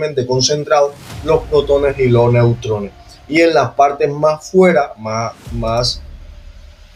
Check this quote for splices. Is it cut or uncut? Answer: uncut